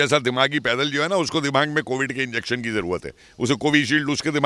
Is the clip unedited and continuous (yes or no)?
yes